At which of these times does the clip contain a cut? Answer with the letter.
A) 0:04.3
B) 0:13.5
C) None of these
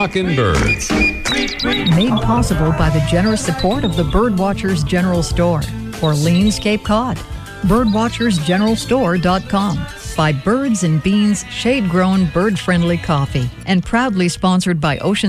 B